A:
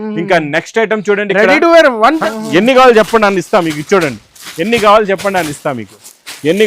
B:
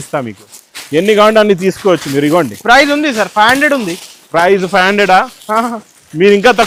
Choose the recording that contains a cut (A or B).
A